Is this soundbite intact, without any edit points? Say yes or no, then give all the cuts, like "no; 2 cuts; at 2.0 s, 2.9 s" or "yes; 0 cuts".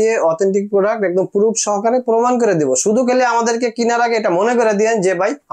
yes; 0 cuts